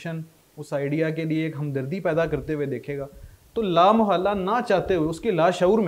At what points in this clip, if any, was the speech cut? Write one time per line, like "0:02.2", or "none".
none